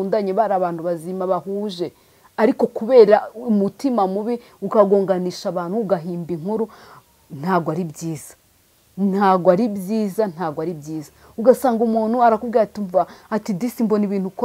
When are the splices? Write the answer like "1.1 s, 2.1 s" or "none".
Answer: none